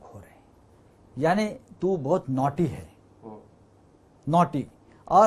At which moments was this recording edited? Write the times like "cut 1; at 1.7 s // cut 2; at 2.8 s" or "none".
none